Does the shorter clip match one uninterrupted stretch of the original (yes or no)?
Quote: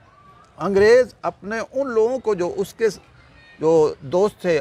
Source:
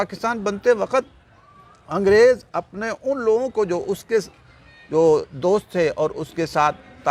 yes